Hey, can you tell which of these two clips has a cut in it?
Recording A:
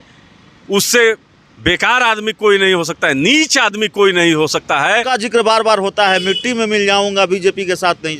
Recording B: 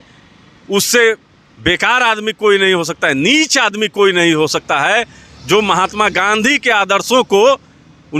A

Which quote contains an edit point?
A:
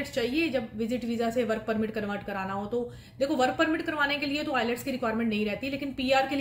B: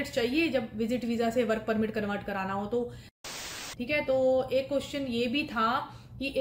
B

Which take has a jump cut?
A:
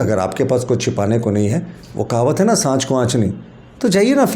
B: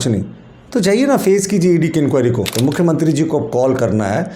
B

